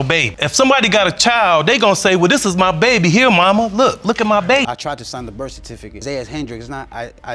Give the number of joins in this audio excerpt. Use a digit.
1